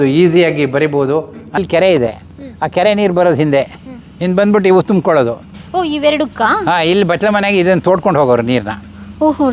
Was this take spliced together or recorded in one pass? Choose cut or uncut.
cut